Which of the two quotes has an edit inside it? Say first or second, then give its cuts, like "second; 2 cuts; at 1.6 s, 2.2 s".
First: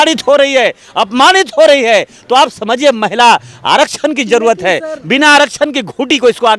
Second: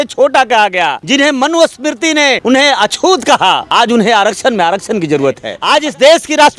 second; 4 cuts; at 1.0 s, 2.4 s, 3.6 s, 5.5 s